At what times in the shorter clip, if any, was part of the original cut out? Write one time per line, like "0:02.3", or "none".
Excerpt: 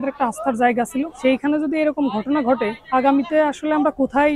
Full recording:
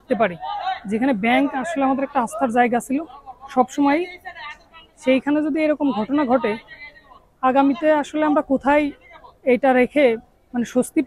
0:01.1
0:02.8